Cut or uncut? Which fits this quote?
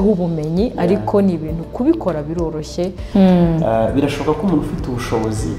cut